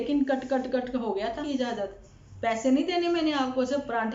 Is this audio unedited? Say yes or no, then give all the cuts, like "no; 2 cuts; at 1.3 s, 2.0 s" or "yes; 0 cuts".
no; 1 cut; at 1.5 s